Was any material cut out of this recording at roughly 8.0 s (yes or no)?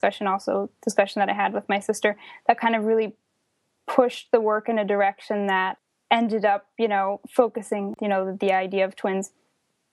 yes